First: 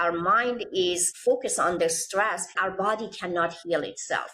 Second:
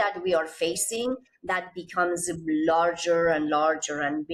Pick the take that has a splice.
first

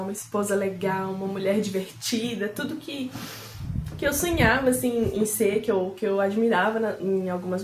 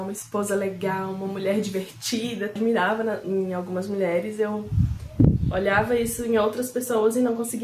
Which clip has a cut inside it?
second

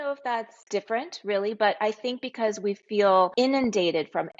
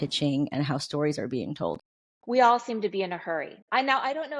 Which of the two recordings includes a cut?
first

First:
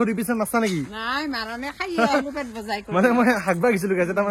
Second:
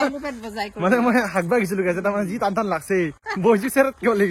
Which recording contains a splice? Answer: second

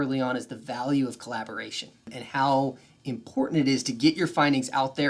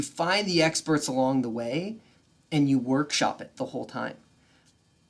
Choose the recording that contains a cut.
first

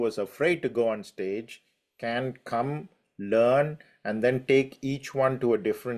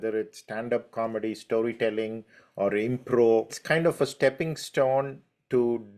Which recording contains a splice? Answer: second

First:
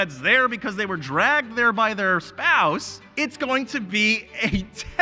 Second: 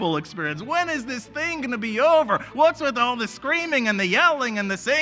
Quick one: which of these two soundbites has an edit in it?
first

